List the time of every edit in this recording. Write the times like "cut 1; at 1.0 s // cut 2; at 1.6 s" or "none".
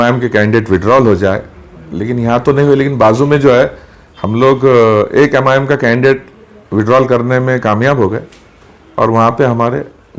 none